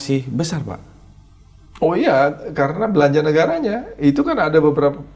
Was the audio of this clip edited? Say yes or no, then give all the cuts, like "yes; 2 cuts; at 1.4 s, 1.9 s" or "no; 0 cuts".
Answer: no; 0 cuts